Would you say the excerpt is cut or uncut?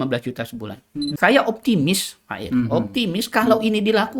cut